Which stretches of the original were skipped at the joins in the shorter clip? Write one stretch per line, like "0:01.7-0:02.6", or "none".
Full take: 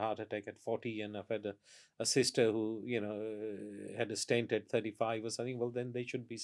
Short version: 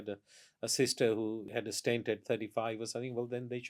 0:02.8-0:03.9